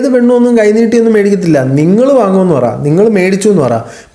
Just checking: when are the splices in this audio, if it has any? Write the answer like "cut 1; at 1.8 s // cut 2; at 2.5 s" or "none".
none